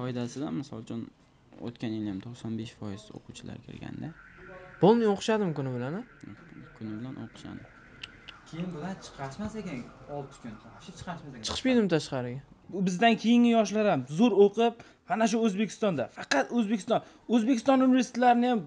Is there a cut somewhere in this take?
yes; 1 cut; at 12.6 s

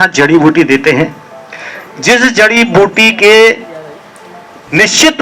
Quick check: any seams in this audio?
no; 0 cuts

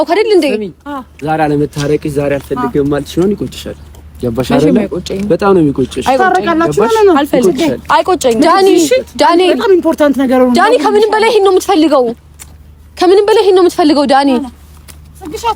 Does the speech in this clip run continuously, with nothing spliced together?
yes; 0 cuts

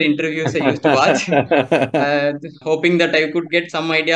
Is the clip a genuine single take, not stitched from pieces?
no; 1 cut; at 2.5 s

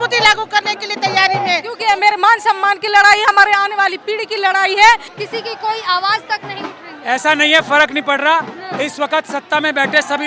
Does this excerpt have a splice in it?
yes; 2 cuts; at 1.7 s, 5.1 s

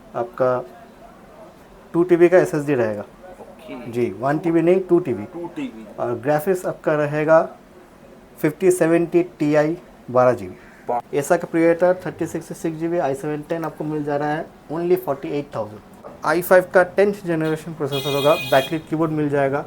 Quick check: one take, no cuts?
no; 2 cuts; at 11.0 s, 16.2 s

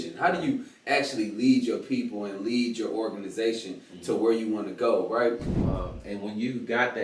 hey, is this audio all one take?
no; 1 cut; at 5.5 s

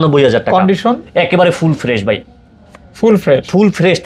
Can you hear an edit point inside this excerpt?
no; 0 cuts

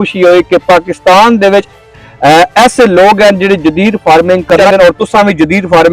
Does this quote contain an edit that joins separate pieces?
yes; 1 cut; at 4.6 s

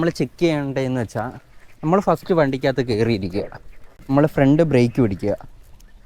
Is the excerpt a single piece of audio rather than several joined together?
yes; 0 cuts

